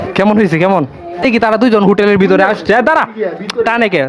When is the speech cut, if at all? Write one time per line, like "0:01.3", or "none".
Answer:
0:01.2